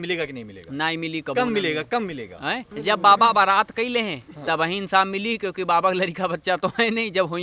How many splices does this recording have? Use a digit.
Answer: 1